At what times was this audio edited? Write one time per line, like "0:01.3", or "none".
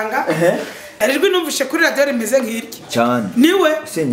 0:01.0